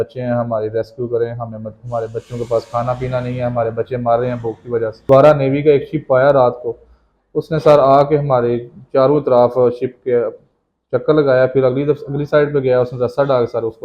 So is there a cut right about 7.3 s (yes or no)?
no